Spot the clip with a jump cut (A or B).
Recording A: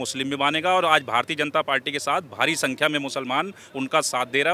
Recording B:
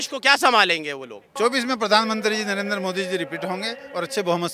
B